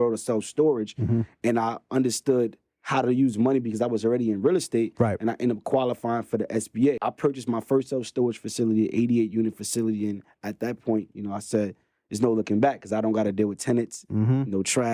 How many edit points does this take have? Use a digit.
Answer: 1